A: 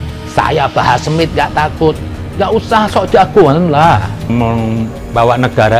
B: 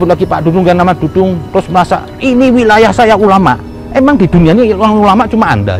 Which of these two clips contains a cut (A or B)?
A